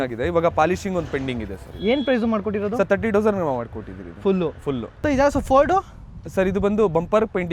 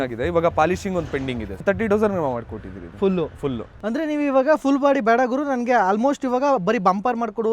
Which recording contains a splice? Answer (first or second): second